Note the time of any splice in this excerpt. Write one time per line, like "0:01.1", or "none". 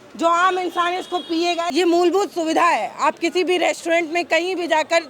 0:01.7